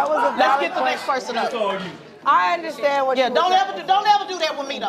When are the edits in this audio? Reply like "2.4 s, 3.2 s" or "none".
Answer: 1.9 s